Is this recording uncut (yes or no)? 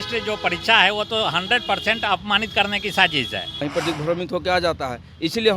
no